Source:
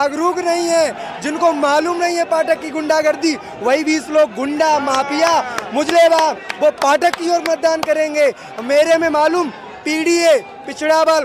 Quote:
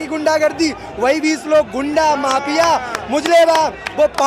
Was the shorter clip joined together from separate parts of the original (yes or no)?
no